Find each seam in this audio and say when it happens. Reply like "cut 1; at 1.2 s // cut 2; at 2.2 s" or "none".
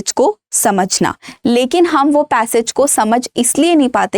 none